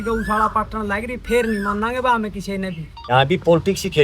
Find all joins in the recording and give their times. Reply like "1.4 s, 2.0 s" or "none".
3.1 s